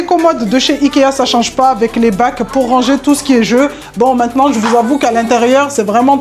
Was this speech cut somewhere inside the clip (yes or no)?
no